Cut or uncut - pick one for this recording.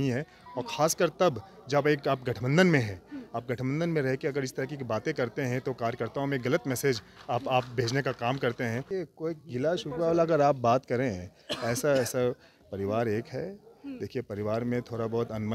cut